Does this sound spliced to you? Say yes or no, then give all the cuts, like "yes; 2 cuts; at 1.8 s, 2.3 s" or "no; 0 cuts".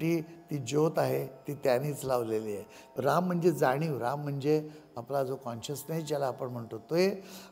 yes; 1 cut; at 2.9 s